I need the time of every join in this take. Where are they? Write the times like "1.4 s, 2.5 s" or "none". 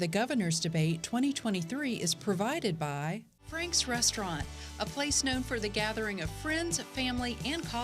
3.4 s